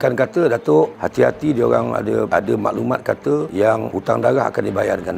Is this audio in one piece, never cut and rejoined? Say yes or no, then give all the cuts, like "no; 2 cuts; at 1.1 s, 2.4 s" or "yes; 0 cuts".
yes; 0 cuts